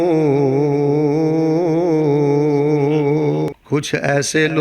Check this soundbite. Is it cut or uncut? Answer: cut